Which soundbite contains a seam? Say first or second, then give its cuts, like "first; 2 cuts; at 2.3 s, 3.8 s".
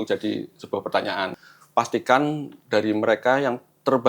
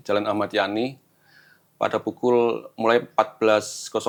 first; 1 cut; at 1.3 s